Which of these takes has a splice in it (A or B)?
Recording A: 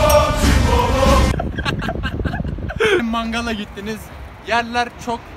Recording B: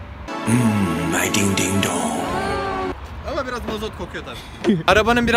A